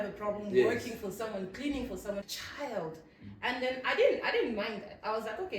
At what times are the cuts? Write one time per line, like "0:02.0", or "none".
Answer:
0:02.3